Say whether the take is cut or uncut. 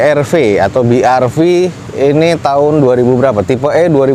uncut